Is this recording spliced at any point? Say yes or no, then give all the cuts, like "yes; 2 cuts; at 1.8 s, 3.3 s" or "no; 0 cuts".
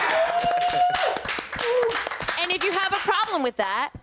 yes; 1 cut; at 2.2 s